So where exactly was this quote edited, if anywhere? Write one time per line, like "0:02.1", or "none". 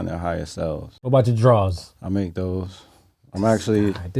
0:00.9